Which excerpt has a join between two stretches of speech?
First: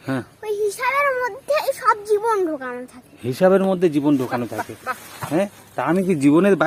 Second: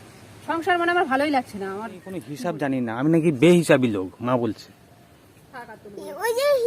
second; 1 cut; at 2.4 s

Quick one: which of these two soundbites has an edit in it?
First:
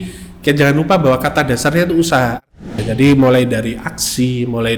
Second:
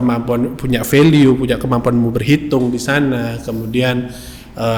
first; 1 cut; at 2.7 s

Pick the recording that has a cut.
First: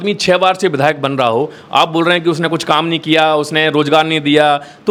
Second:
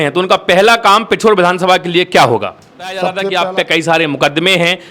second; 1 cut; at 3.2 s

